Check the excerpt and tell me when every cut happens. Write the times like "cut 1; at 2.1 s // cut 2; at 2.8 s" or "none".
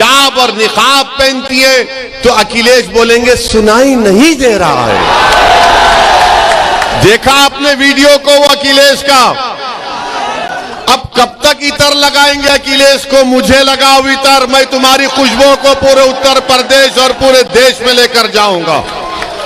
none